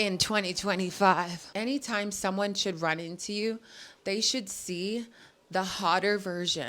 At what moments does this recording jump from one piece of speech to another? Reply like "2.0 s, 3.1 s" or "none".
1.4 s